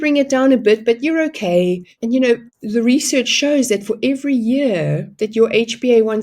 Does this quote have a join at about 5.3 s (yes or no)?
no